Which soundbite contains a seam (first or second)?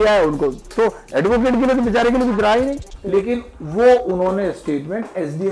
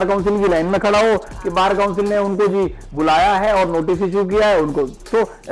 first